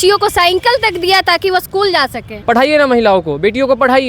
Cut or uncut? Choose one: cut